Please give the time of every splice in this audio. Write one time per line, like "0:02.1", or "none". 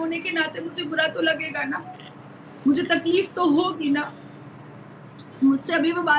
none